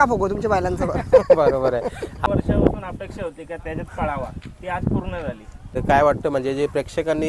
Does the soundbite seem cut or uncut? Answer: cut